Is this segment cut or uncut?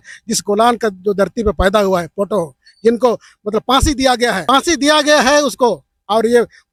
uncut